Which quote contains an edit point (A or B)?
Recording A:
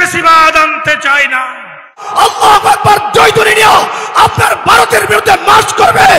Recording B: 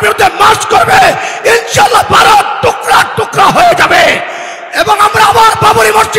A